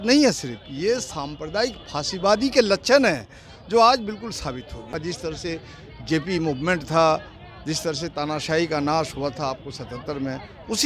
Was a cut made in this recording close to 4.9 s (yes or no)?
yes